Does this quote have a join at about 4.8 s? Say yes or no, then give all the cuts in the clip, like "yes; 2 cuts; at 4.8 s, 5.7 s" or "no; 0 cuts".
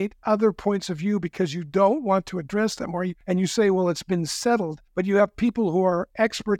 yes; 2 cuts; at 3.2 s, 4.8 s